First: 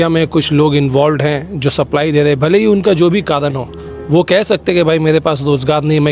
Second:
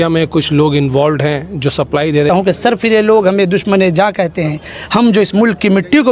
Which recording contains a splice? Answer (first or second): second